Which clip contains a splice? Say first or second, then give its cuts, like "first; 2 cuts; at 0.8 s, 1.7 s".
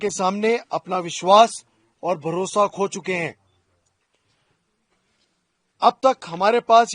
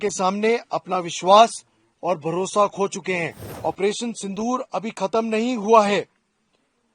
second; 1 cut; at 3.4 s